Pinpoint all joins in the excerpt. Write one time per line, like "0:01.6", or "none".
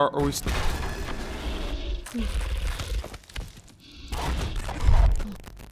none

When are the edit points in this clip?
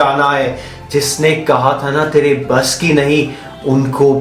none

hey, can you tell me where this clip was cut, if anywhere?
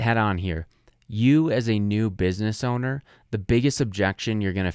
none

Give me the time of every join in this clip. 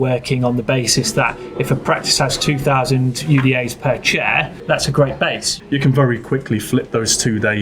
0:04.6
0:05.5

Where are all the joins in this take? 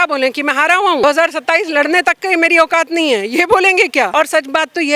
0:01.0
0:04.1

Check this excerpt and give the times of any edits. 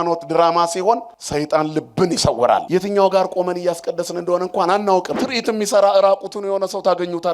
0:01.2
0:02.7
0:05.2

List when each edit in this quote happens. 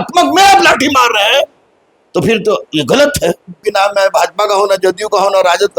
0:03.7

